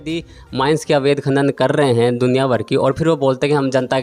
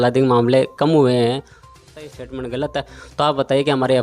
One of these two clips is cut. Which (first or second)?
second